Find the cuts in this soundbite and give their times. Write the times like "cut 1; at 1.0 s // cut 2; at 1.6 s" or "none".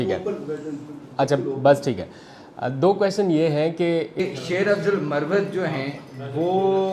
cut 1; at 4.2 s